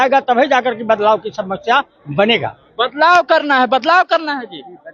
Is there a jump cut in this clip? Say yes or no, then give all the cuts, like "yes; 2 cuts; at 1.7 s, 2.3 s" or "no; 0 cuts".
no; 0 cuts